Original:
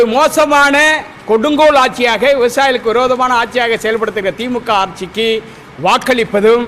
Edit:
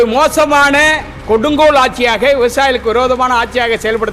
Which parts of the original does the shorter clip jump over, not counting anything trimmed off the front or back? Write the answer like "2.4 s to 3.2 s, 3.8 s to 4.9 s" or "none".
none